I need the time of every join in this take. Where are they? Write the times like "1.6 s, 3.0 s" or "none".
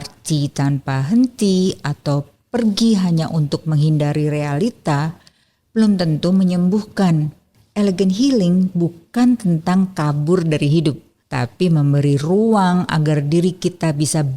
none